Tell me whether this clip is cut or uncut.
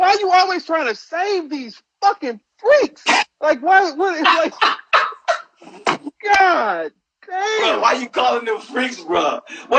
uncut